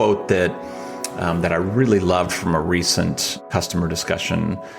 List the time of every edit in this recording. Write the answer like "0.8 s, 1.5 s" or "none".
3.4 s